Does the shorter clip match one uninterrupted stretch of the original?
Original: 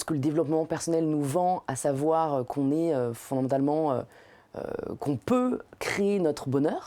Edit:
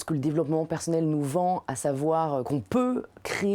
no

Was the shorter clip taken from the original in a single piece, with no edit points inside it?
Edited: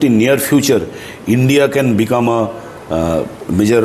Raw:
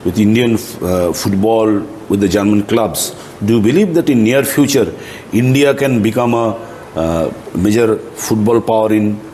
yes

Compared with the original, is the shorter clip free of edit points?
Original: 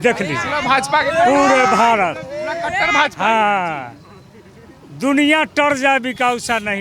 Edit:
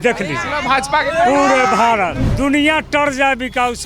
no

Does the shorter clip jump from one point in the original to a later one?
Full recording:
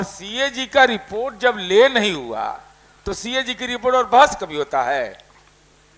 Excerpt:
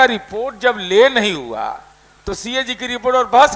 no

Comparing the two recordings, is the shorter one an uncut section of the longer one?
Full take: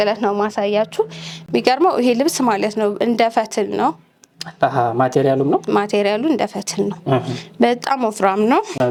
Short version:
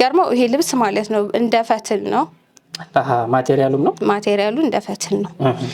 yes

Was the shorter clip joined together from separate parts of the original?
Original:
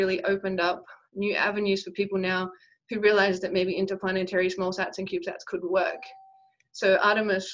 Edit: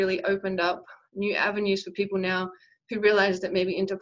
no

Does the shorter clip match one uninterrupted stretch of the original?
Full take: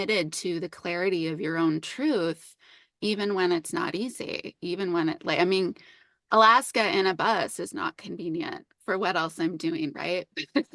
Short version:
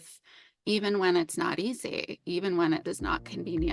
no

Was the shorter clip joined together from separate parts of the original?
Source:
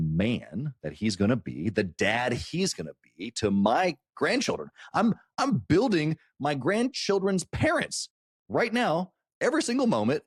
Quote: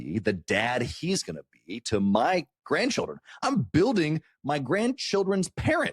yes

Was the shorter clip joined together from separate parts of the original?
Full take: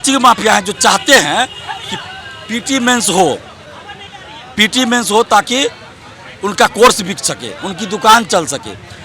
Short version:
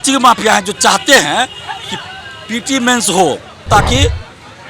yes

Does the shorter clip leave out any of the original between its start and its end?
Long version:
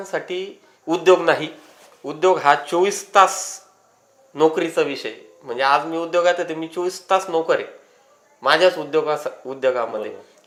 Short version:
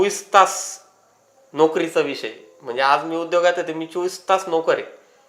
no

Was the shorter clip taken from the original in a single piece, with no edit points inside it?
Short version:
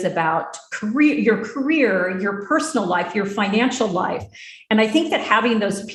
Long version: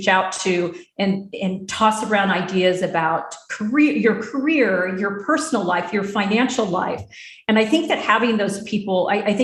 yes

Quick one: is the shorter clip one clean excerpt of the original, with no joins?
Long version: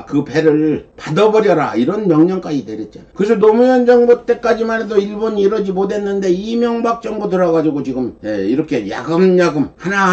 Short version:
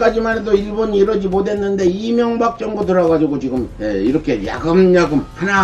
yes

